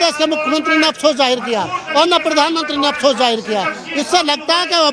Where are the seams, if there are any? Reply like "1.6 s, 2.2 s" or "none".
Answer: none